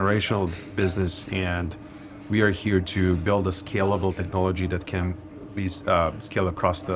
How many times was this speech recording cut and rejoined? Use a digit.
0